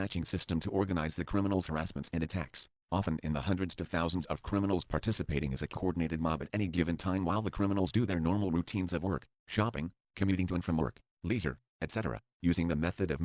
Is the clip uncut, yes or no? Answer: yes